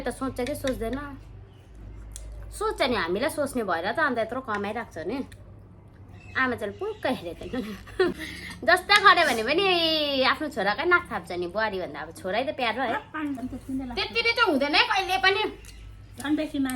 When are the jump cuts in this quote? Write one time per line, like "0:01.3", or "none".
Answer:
0:08.1
0:13.4